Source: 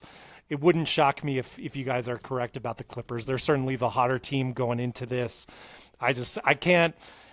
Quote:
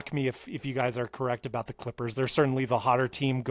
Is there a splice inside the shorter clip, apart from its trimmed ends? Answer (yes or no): no